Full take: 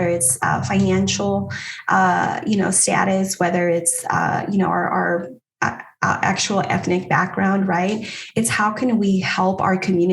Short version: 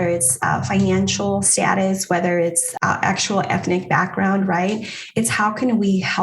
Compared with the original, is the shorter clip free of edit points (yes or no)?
no